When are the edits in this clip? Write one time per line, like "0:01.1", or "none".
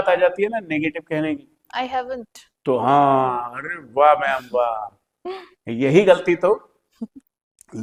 none